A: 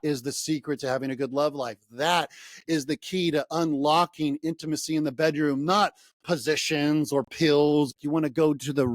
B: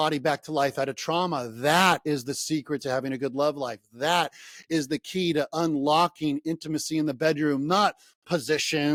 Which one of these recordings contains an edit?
A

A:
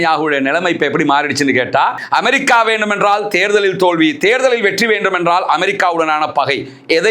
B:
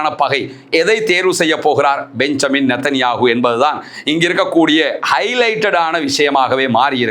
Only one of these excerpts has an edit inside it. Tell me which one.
A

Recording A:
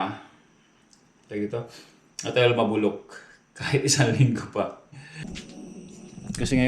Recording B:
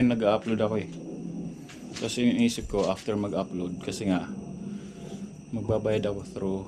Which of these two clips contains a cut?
A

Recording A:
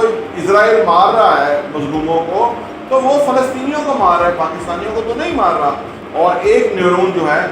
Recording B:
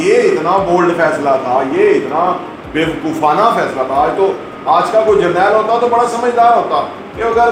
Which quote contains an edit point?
A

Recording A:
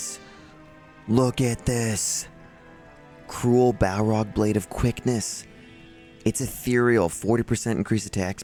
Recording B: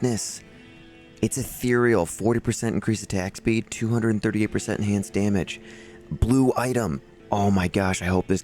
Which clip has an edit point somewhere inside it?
B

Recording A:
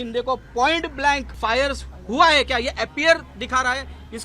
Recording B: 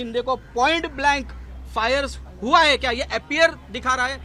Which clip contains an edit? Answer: A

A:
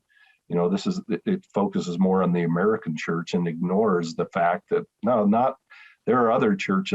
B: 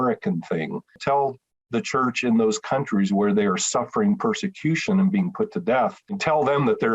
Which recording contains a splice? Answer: B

